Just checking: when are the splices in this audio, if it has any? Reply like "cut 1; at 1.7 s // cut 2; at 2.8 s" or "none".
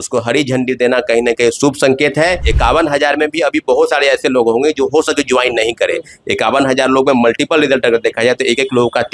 cut 1; at 2.5 s